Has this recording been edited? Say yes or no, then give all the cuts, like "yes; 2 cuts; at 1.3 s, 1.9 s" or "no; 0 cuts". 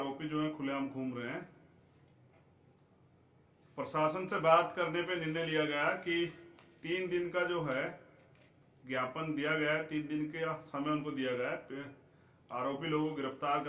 no; 0 cuts